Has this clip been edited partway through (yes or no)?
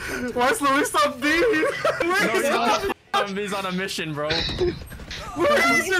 yes